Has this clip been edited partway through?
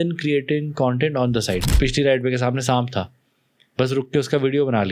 yes; 1 cut; at 1.7 s

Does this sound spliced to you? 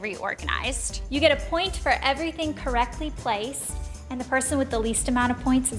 no; 0 cuts

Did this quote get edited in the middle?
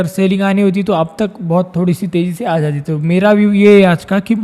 no; 0 cuts

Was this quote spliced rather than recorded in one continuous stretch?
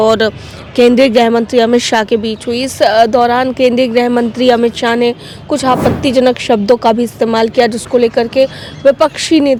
no; 0 cuts

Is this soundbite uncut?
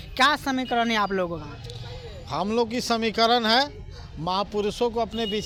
yes; 0 cuts

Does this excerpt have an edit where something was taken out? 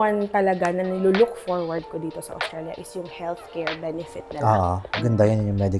yes; 1 cut; at 4.9 s

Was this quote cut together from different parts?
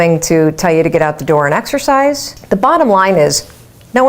yes; 1 cut; at 2.3 s

